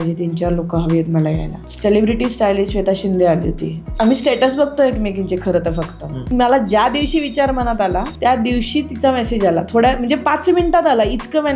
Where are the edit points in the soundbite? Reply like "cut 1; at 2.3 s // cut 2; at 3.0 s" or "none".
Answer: cut 1; at 3.8 s // cut 2; at 6.3 s